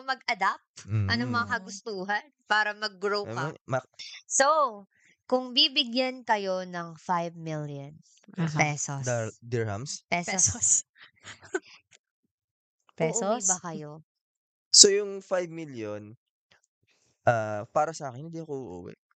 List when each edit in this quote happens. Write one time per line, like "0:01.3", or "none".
0:04.0

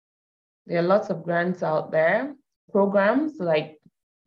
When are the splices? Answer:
0:02.5

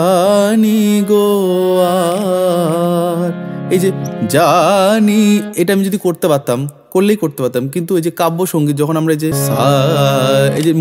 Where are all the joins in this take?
0:09.4

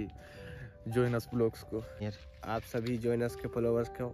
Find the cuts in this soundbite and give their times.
0:02.0

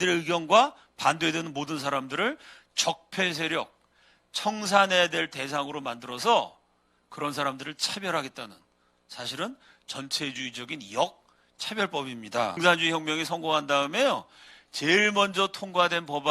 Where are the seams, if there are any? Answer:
0:12.6

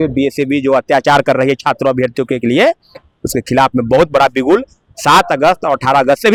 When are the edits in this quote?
none

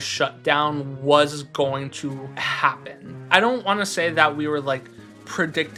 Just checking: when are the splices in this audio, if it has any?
none

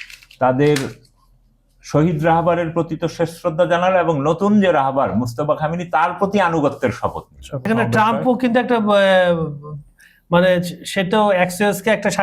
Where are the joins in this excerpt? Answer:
0:07.7

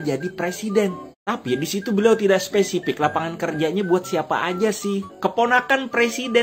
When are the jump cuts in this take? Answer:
0:01.1
0:05.1

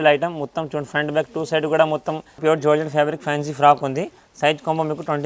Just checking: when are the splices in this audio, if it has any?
0:02.3

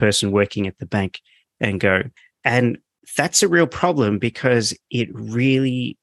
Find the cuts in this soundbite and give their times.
0:02.2

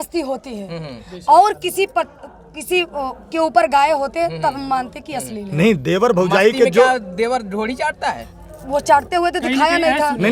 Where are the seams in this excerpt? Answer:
none

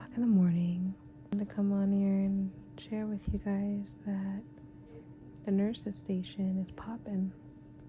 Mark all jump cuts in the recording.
0:01.3

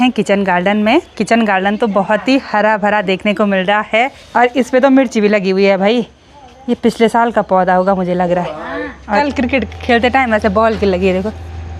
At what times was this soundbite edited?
0:04.2
0:09.2

